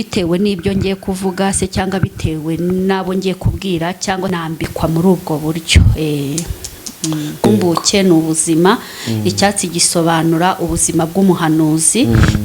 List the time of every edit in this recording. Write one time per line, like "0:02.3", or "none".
0:04.4
0:07.4